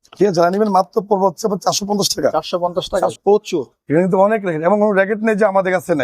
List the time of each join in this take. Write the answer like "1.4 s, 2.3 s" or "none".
3.2 s

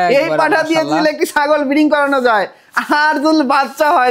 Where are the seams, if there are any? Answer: none

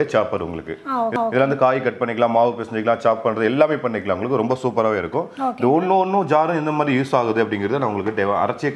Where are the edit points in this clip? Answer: none

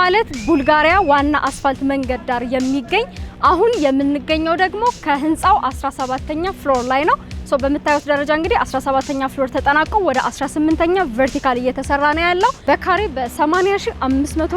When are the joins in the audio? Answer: 12.6 s

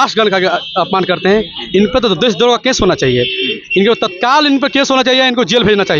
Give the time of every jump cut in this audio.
none

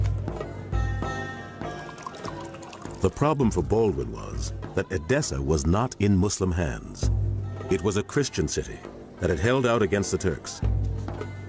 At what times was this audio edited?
none

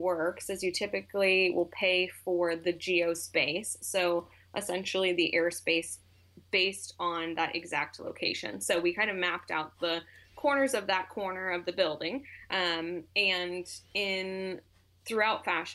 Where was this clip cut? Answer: none

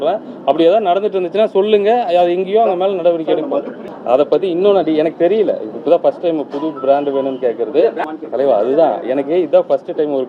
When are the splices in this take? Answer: 3.8 s, 8.0 s

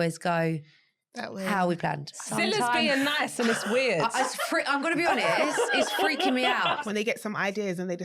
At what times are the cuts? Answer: 2.1 s, 6.8 s

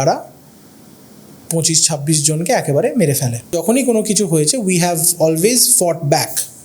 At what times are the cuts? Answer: 3.5 s

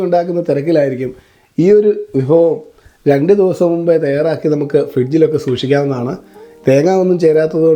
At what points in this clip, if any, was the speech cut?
none

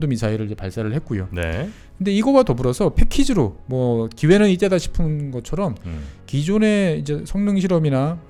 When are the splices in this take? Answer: none

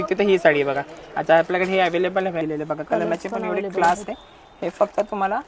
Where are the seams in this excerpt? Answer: 2.4 s

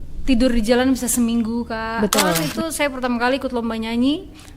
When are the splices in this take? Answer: 2.5 s

